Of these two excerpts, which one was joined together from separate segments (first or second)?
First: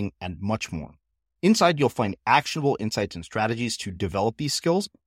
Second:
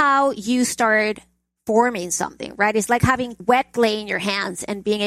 second